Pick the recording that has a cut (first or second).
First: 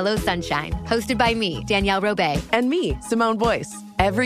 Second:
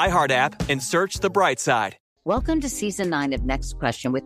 second